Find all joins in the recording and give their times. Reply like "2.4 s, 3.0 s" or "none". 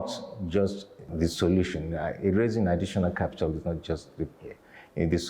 1.1 s